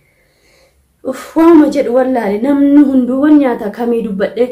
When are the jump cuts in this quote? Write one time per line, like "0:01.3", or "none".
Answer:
none